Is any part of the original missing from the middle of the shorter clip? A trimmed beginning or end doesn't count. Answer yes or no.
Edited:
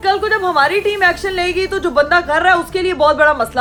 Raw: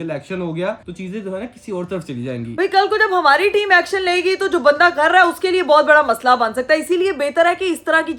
no